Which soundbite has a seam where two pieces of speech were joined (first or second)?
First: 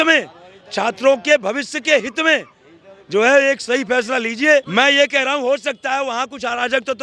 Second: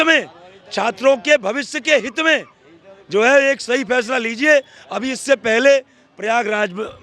first